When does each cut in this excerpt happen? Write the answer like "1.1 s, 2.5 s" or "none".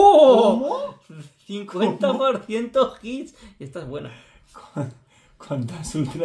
none